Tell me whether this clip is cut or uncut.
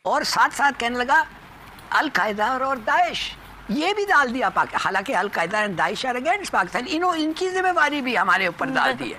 uncut